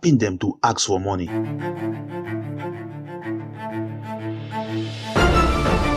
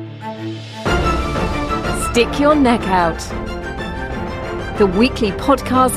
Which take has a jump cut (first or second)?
first